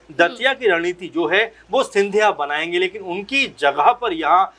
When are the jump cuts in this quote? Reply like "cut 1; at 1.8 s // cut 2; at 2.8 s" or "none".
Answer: none